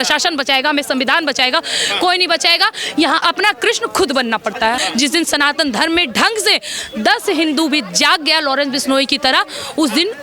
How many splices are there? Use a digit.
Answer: 2